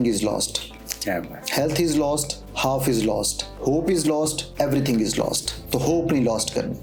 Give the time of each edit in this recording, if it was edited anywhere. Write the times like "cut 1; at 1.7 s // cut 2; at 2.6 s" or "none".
none